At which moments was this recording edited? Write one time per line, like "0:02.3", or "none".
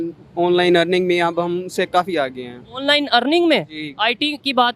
0:02.8